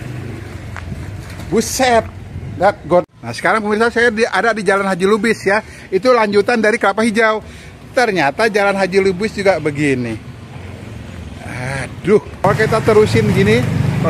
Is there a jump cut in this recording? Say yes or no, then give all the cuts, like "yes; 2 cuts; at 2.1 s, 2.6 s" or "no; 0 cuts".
yes; 2 cuts; at 3.1 s, 12.4 s